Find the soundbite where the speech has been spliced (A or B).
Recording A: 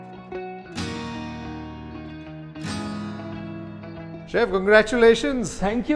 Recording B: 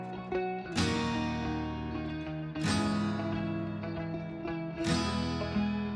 A